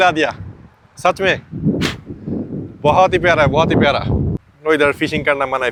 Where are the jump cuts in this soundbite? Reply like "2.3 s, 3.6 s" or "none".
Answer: none